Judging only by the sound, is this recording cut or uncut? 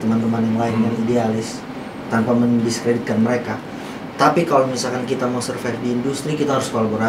uncut